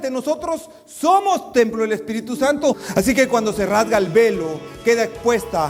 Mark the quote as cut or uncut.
cut